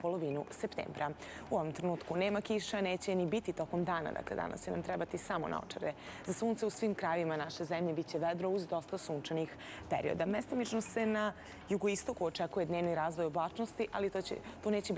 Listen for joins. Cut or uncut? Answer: cut